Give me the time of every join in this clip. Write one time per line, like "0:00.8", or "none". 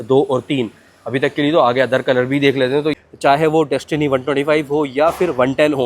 0:03.0